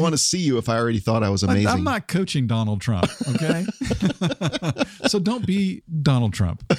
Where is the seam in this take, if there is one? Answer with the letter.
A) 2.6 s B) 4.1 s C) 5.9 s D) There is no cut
C